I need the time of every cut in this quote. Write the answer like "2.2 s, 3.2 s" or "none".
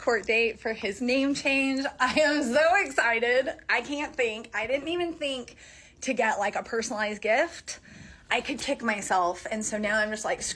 4.1 s